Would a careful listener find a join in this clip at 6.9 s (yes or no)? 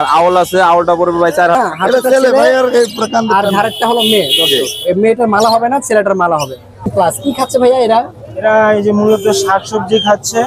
yes